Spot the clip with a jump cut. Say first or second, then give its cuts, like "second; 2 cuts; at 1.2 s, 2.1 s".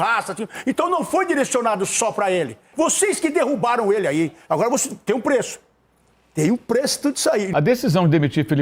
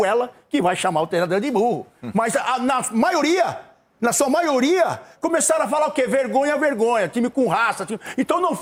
first; 2 cuts; at 2.7 s, 7.5 s